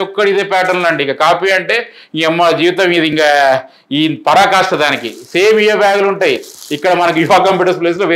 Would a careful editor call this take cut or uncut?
uncut